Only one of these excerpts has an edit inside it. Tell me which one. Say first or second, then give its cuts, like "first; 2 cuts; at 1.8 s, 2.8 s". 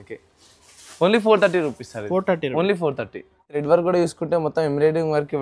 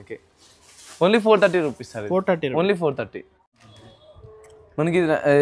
first; 1 cut; at 3.6 s